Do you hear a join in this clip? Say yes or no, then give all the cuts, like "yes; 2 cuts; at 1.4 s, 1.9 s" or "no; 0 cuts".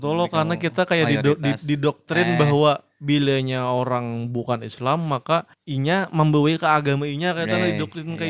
yes; 1 cut; at 5.6 s